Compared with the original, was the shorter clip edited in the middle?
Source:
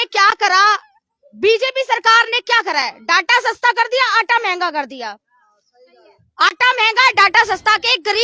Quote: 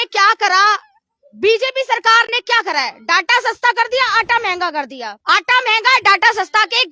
yes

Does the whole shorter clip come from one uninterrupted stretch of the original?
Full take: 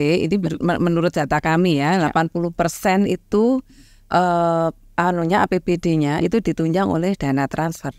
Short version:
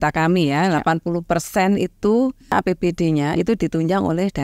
no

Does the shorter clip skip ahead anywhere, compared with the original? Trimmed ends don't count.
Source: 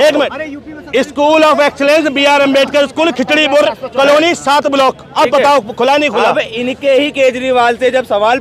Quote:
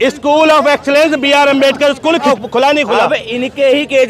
yes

